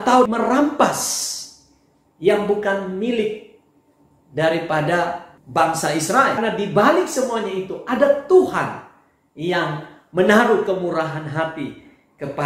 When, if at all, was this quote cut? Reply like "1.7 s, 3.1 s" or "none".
6.4 s